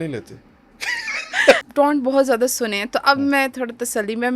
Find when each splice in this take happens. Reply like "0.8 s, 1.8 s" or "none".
1.6 s